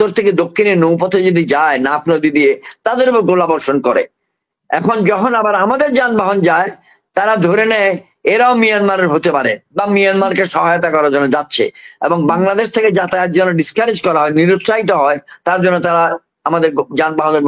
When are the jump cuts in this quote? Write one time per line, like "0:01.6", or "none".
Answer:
none